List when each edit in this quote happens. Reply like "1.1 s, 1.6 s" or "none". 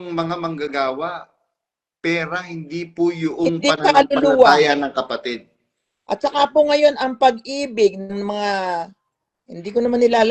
none